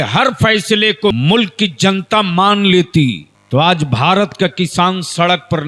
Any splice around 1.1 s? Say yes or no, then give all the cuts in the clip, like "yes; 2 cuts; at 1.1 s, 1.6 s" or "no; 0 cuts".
yes; 2 cuts; at 1.1 s, 3.3 s